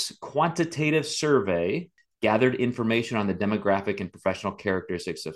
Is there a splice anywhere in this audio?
yes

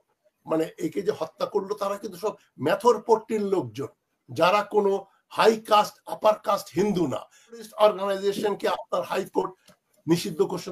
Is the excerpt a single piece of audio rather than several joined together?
no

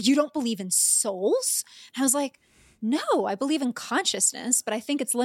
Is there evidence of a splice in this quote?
no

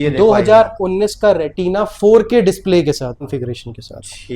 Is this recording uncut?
no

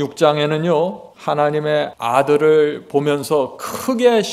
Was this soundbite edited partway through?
yes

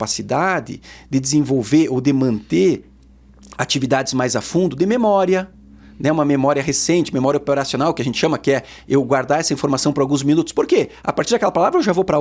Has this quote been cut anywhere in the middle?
no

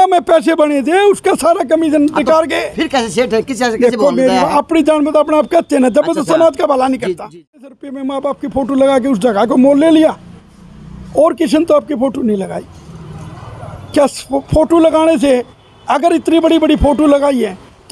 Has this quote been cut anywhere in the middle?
yes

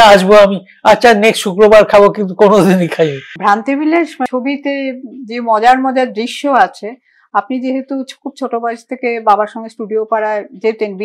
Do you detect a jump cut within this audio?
yes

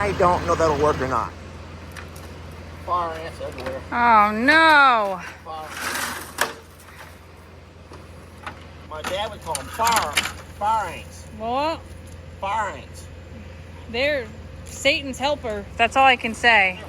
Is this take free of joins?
no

